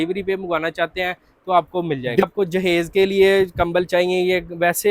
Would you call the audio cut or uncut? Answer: cut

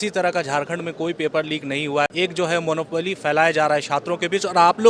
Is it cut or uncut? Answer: cut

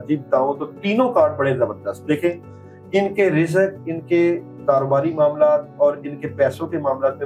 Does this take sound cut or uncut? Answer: uncut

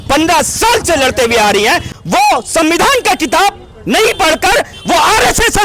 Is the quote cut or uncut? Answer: cut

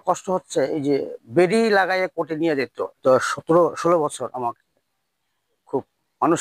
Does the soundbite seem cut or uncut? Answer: cut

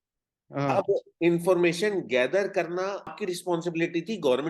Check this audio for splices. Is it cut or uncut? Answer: cut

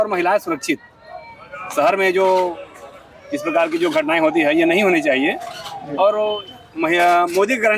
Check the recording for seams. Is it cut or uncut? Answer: uncut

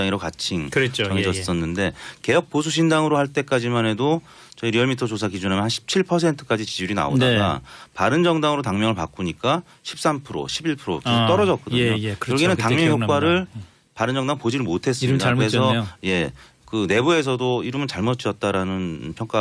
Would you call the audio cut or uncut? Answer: cut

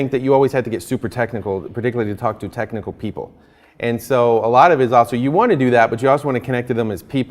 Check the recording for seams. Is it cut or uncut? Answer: uncut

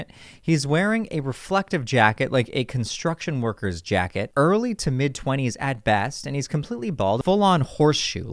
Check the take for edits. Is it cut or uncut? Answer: cut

